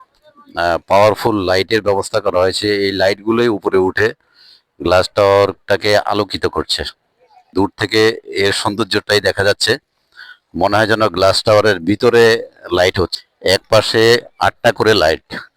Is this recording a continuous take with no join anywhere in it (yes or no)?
no